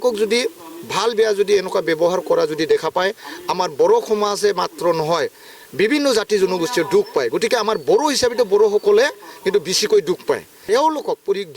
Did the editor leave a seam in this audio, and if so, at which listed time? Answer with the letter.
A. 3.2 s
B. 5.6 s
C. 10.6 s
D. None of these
C